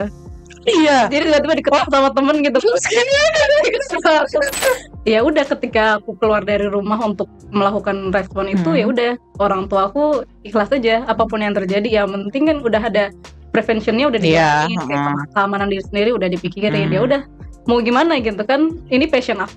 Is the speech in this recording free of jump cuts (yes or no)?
no